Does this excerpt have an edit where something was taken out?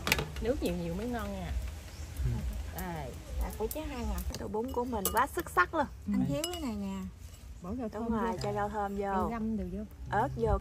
yes; 1 cut; at 4.3 s

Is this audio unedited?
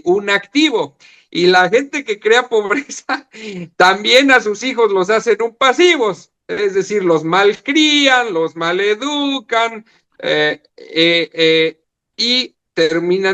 yes; 0 cuts

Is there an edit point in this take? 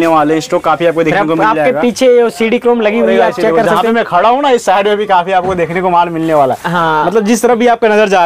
no; 0 cuts

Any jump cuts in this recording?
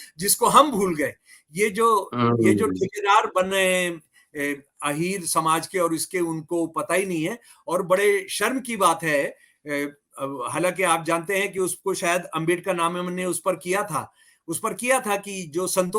no; 0 cuts

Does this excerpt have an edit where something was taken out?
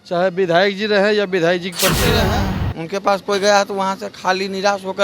yes; 1 cut; at 2.2 s

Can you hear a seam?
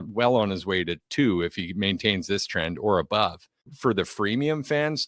yes; 1 cut; at 3.7 s

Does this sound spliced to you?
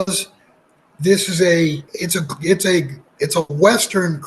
yes; 2 cuts; at 1.9 s, 3.0 s

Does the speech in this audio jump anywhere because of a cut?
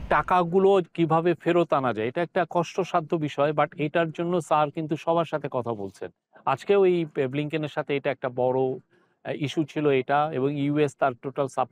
no; 0 cuts

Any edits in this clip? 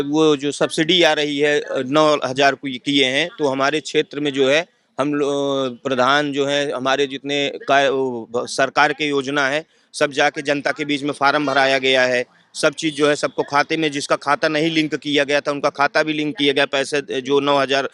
no; 0 cuts

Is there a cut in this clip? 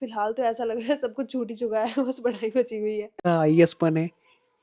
yes; 1 cut; at 3.2 s

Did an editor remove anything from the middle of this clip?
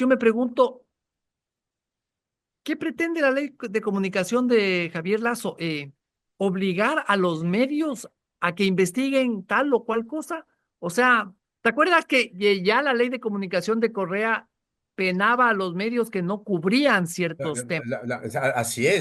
no; 0 cuts

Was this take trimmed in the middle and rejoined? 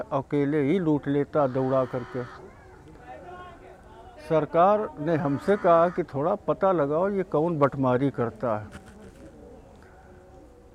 no; 0 cuts

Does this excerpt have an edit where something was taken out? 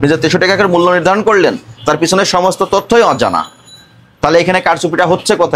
no; 0 cuts

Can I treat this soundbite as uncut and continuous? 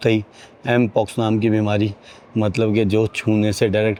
yes; 0 cuts

